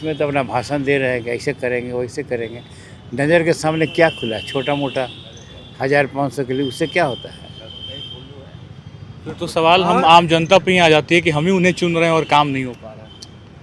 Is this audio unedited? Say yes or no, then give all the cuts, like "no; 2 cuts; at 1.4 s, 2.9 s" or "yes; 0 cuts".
yes; 0 cuts